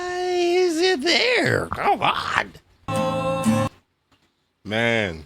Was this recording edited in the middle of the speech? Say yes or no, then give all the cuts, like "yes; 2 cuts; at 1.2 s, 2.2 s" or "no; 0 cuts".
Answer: yes; 1 cut; at 2.9 s